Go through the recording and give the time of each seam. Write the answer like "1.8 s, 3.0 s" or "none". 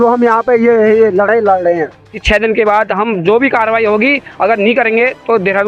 2.2 s